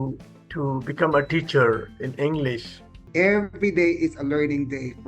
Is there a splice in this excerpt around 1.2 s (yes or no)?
no